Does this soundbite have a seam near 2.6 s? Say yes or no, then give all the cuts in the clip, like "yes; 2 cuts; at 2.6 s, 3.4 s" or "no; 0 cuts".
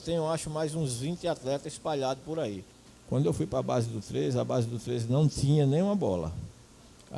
yes; 1 cut; at 2.6 s